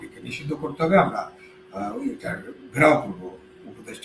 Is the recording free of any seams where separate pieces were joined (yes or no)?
yes